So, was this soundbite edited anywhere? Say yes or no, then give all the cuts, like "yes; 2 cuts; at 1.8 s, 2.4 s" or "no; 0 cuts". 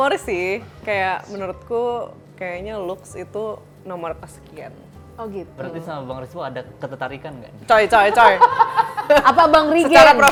no; 0 cuts